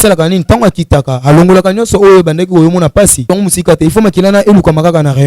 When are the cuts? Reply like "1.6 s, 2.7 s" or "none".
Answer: 3.3 s